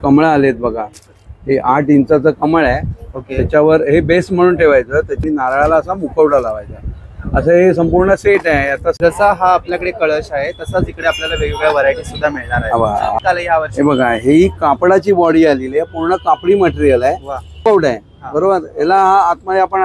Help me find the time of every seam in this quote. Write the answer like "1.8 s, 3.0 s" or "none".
5.2 s, 9.1 s, 13.2 s, 17.6 s